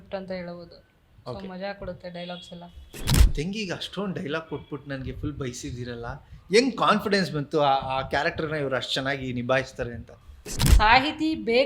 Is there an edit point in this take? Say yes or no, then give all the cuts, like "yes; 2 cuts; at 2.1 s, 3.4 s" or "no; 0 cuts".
yes; 2 cuts; at 3.1 s, 10.6 s